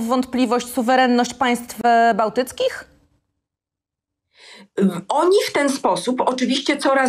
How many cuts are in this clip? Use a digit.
0